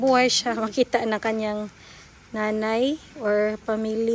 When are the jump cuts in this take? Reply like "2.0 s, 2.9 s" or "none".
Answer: none